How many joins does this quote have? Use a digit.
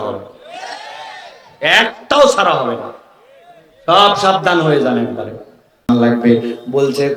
1